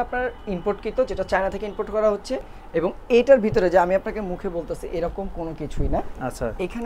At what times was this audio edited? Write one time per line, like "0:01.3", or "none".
none